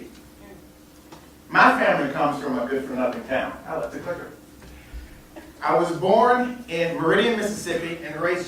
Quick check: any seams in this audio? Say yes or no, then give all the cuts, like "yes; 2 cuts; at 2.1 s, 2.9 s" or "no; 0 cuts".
no; 0 cuts